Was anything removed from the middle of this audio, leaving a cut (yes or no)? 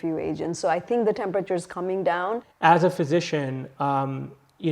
yes